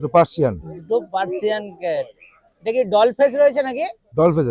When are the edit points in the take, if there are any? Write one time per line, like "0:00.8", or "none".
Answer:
none